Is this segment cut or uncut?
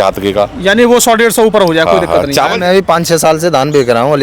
cut